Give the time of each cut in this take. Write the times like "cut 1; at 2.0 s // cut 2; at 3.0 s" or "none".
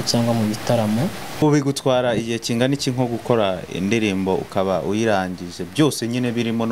cut 1; at 1.4 s